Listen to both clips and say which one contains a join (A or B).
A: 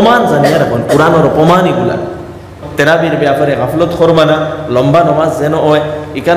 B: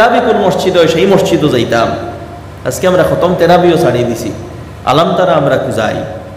A